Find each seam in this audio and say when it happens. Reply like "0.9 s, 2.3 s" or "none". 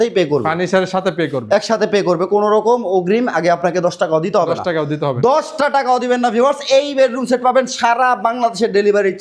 none